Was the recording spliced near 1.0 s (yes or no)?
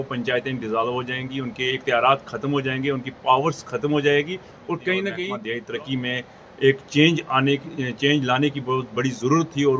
no